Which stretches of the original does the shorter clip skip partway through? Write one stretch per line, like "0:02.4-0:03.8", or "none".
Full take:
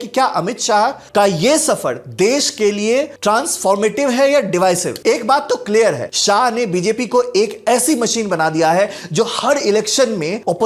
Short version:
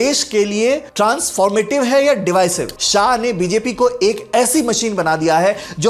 0:05.0-0:06.0